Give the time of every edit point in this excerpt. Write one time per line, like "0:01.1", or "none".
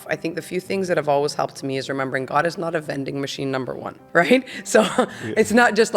0:03.9